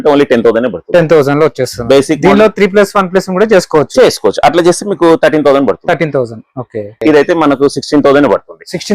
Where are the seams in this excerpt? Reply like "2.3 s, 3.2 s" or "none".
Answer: 6.9 s